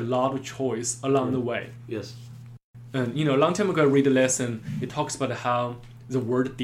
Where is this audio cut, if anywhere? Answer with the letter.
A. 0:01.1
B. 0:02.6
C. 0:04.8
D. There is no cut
B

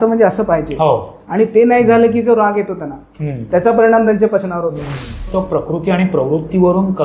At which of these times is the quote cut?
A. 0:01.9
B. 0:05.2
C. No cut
B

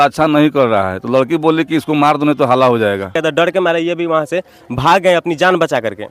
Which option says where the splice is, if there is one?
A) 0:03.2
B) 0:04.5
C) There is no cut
A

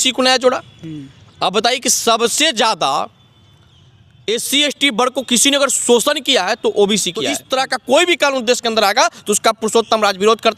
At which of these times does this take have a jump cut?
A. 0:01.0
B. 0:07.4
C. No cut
B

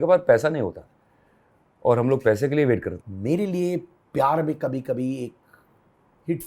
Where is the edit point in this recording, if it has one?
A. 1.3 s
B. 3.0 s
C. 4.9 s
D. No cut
B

